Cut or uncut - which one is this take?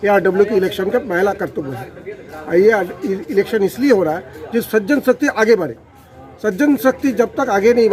uncut